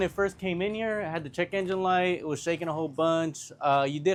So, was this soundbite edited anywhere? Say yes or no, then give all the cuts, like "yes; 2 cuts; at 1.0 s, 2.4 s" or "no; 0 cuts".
no; 0 cuts